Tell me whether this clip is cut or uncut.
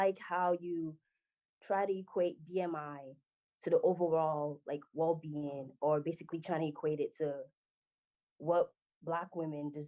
uncut